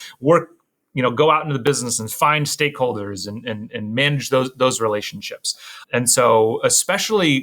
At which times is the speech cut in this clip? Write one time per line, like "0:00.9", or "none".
0:05.7